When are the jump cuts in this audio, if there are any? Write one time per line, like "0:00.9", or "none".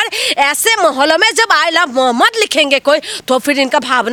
none